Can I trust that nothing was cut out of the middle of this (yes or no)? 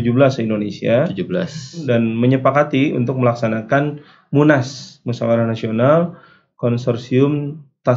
no